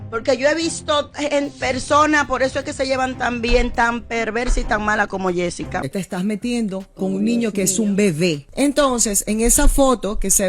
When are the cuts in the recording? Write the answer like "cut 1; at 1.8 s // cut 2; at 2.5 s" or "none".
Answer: cut 1; at 5.8 s